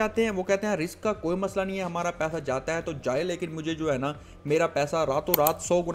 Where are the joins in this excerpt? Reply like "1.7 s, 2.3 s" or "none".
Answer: none